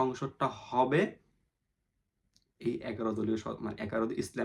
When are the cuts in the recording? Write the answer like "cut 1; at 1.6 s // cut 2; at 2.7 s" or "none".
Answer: none